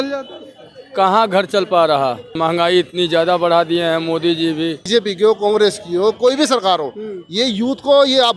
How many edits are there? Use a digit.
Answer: 2